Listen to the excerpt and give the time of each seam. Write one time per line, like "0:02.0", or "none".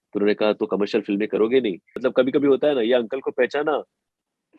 0:01.9